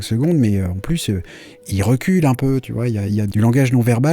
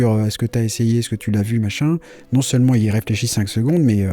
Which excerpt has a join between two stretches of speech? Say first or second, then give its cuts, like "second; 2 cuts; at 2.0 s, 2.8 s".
first; 2 cuts; at 1.7 s, 3.2 s